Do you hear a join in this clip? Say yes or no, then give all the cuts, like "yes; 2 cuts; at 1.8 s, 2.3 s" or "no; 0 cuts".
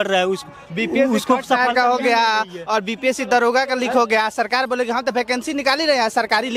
no; 0 cuts